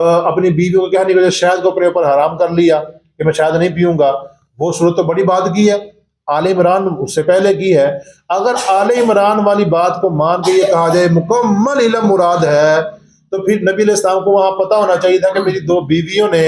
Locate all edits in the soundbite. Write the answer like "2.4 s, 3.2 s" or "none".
none